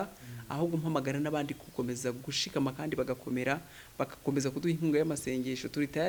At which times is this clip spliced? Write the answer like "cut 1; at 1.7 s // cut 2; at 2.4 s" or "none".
none